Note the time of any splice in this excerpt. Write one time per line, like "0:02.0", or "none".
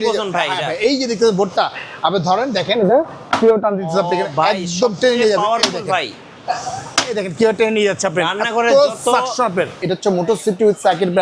none

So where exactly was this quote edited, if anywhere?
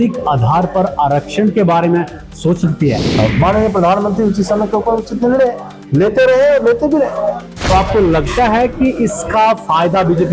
0:03.1
0:07.5

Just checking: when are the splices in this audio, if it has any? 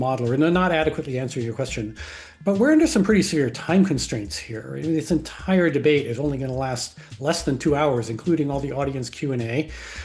none

